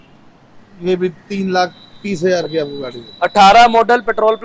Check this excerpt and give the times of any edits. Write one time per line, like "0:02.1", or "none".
none